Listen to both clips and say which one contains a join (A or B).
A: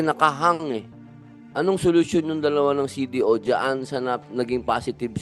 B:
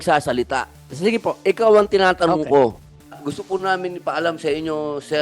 B